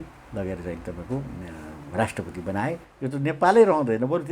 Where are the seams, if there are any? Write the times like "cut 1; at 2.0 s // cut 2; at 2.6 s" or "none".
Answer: cut 1; at 2.9 s